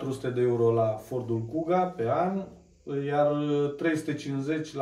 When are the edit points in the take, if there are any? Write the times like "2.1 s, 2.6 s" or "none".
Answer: none